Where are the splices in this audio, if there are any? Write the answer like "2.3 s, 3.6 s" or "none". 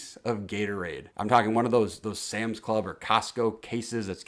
none